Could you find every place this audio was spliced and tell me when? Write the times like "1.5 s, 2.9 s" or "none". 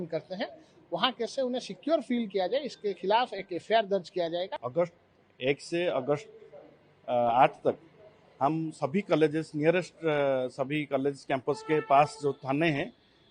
4.6 s